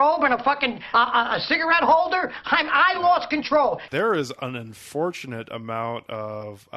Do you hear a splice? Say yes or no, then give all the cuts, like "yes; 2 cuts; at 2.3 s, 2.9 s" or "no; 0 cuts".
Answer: yes; 1 cut; at 3.9 s